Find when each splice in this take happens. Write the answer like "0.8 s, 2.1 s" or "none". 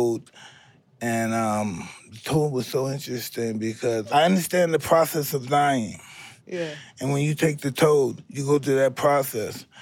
4.1 s

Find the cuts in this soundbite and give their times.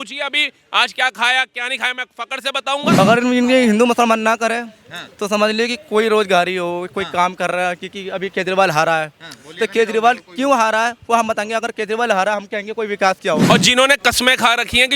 3.0 s, 13.4 s

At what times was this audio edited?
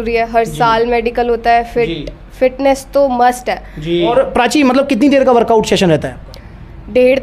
4.1 s

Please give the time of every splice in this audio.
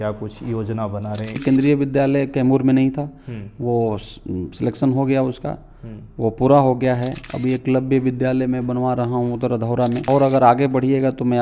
1.4 s, 10.0 s

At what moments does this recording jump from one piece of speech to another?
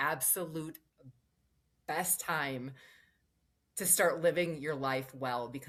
none

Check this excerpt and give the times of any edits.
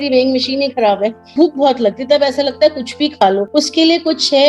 1.2 s, 3.5 s

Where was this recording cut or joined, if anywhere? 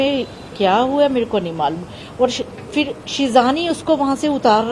none

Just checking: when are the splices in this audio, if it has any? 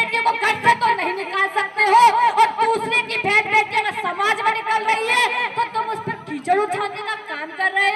none

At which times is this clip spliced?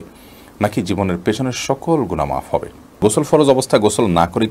3.0 s

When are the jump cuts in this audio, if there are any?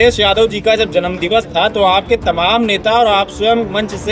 none

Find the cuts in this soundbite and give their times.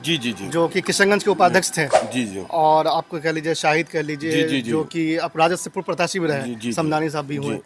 none

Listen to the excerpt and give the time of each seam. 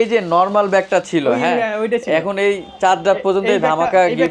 none

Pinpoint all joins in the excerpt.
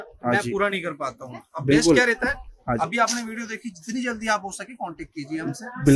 none

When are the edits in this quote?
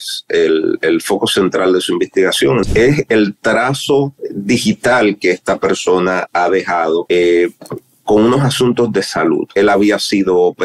2.7 s, 4.3 s, 7.0 s, 9.5 s

